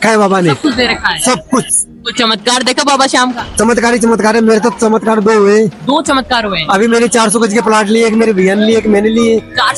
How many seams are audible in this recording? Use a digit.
0